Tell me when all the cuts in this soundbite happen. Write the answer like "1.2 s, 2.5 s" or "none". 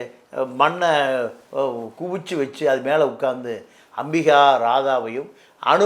none